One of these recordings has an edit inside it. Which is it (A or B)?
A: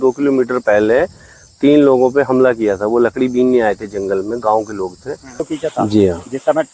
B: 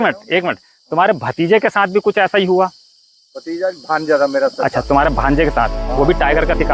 A